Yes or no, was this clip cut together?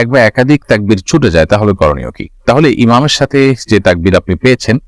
no